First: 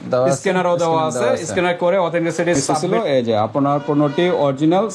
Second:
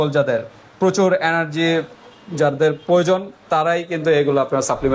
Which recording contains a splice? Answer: first; 1 cut; at 2.7 s

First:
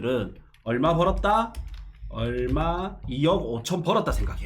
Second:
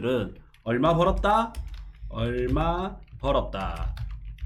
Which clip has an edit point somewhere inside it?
first; 1 cut; at 3.0 s

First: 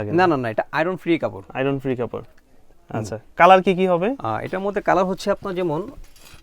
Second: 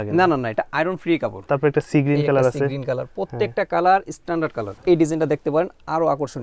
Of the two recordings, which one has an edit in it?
second; 2 cuts; at 1.4 s, 4.7 s

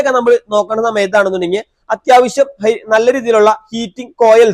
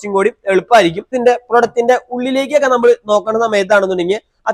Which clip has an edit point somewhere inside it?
second; 1 cut; at 1.1 s

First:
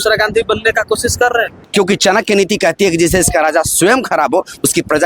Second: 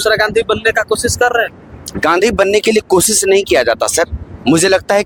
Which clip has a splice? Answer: first; 1 cut; at 1.6 s

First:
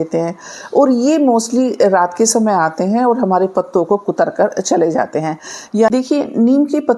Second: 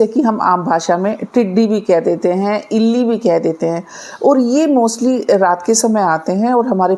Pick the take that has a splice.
first; 1 cut; at 5.9 s

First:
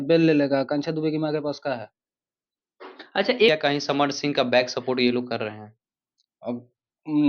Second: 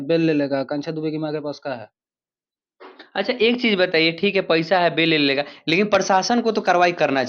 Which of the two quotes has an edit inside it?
first; 1 cut; at 3.5 s

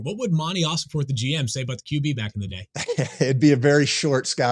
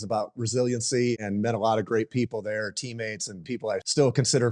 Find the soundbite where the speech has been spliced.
second; 2 cuts; at 1.1 s, 3.5 s

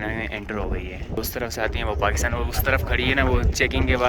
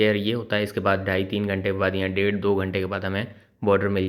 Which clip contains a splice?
first; 1 cut; at 1.2 s

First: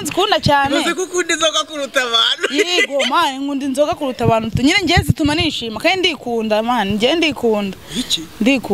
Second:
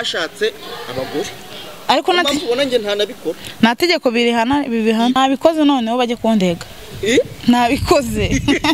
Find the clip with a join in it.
second; 1 cut; at 5.2 s

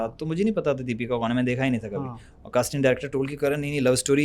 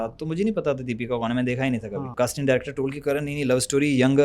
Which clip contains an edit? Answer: second; 1 cut; at 2.0 s

